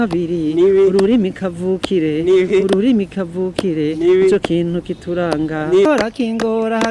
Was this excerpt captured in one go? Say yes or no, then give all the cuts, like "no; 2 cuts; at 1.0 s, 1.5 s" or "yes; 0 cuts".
no; 1 cut; at 5.9 s